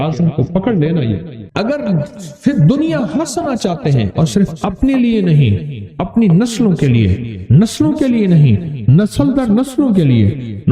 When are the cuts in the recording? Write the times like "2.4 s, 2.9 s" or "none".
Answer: 1.4 s